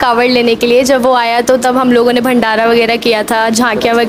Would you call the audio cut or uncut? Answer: uncut